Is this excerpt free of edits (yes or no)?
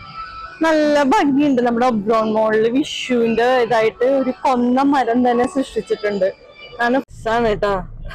no